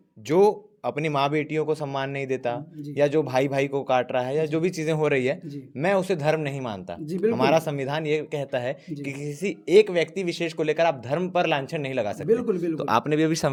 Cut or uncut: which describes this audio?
uncut